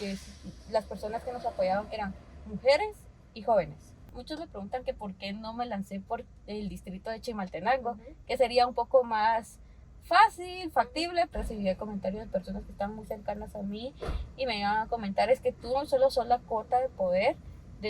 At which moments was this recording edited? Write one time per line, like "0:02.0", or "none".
0:04.1
0:11.3